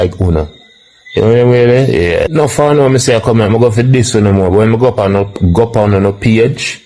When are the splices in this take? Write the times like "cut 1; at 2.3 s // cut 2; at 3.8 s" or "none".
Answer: cut 1; at 2.3 s